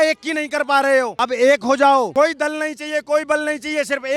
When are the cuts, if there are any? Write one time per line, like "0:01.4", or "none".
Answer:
0:01.2
0:02.1